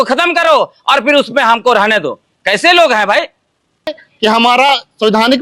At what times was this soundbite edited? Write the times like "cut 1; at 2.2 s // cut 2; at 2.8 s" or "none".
cut 1; at 4.0 s